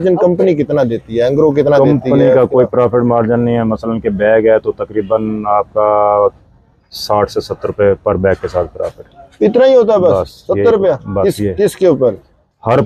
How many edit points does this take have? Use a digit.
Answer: 0